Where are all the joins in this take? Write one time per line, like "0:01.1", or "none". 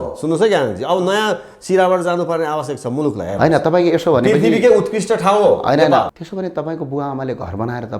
0:06.1

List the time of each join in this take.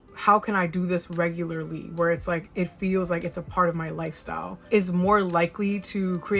none

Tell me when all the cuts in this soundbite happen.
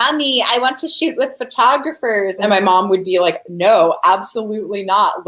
0:02.4

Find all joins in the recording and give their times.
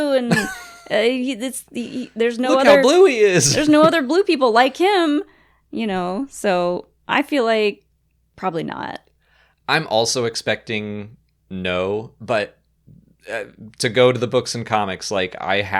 none

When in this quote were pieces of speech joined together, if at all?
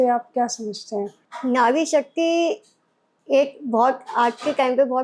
0:01.2

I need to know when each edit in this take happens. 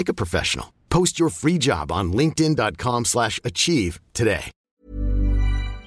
0:04.5

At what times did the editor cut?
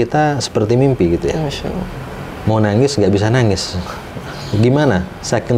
none

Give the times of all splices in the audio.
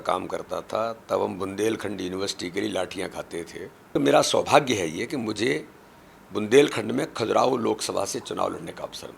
0:03.9

